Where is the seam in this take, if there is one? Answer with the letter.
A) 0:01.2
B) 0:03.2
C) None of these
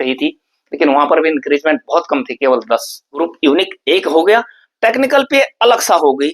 B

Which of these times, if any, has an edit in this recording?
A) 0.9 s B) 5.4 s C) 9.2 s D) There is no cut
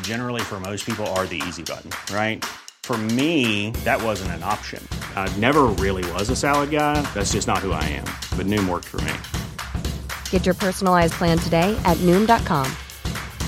D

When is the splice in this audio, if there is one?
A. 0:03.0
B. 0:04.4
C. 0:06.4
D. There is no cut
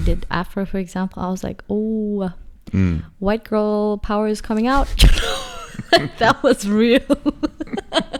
D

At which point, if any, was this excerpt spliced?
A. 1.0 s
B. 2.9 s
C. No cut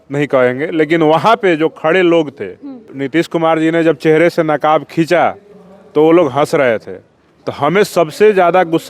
B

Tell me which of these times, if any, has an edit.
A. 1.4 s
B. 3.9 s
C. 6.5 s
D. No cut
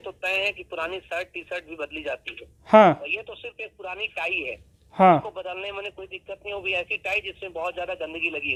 D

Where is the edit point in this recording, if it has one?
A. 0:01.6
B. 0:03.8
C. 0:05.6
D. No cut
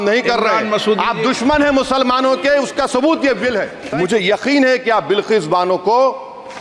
B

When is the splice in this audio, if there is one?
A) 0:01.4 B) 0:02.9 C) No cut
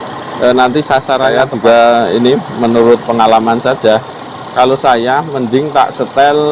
A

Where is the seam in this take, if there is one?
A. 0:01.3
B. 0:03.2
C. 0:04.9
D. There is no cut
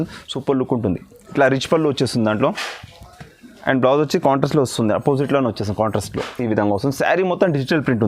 A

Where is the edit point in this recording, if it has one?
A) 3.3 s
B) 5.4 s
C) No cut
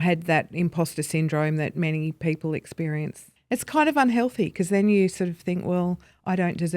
A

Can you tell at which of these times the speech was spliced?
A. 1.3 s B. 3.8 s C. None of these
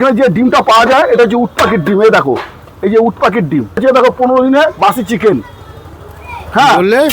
B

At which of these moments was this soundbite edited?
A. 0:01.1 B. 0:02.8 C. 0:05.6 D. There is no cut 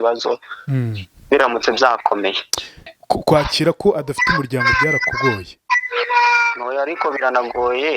B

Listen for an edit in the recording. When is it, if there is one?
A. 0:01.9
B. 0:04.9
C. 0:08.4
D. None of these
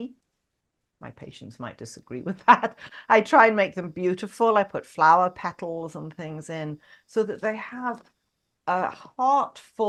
D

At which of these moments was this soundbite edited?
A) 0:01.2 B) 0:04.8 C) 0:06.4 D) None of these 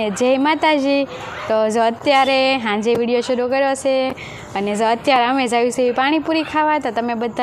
D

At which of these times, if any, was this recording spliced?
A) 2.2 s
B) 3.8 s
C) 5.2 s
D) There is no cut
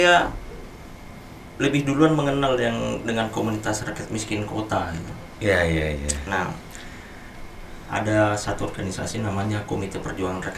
D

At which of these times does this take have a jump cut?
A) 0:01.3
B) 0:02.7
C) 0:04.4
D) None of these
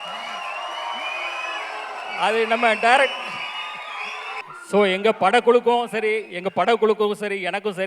C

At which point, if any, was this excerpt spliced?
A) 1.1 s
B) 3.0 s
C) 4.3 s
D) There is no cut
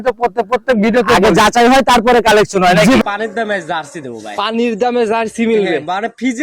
B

